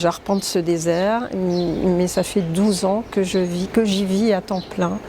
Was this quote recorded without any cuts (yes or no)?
yes